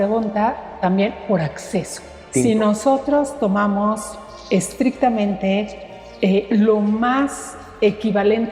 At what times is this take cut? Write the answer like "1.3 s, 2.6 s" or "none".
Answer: 2.2 s